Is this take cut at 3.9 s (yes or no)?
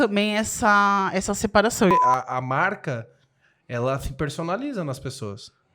no